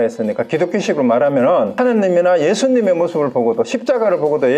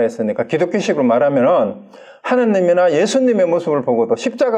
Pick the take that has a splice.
first; 1 cut; at 1.7 s

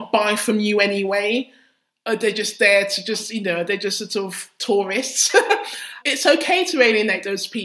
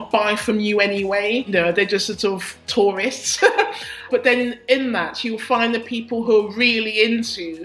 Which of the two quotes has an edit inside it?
second; 2 cuts; at 1.5 s, 4.0 s

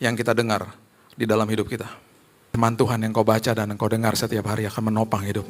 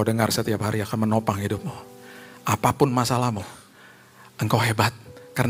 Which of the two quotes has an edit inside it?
first; 1 cut; at 2.5 s

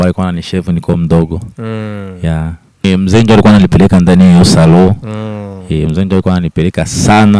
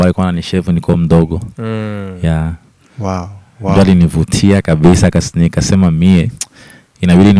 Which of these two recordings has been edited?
first; 1 cut; at 2.8 s

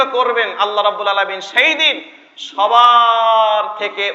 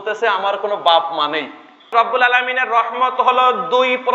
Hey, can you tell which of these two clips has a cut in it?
second; 1 cut; at 1.9 s

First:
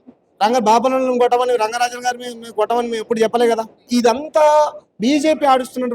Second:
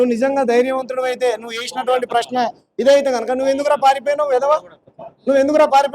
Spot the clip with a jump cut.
first; 1 cut; at 3.9 s

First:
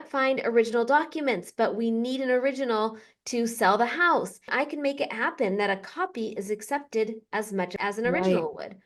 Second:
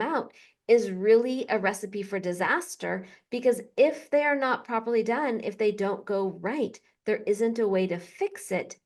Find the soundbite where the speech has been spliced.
first; 2 cuts; at 4.5 s, 7.7 s

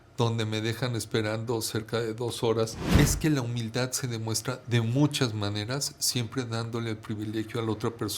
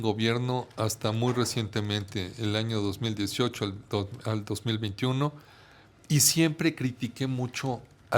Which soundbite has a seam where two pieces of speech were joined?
first; 1 cut; at 3.0 s

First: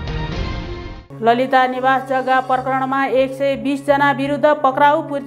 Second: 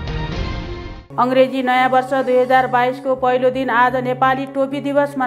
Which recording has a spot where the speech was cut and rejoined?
second; 1 cut; at 1.0 s

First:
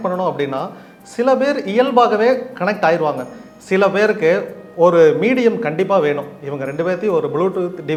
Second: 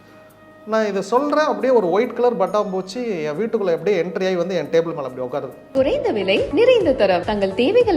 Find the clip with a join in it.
second; 1 cut; at 5.6 s

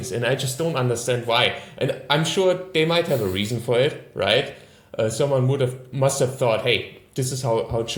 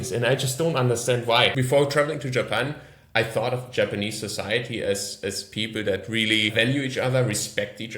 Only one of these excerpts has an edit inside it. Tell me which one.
second; 2 cuts; at 1.6 s, 6.5 s

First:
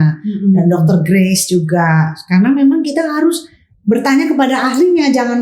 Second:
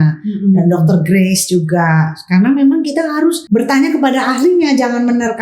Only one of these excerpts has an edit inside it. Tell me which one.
second; 1 cut; at 3.4 s

